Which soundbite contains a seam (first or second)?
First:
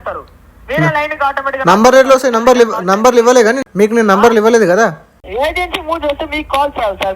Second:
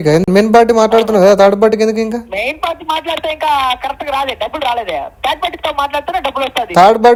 first